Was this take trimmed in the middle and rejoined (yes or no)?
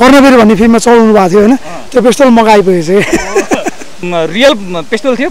yes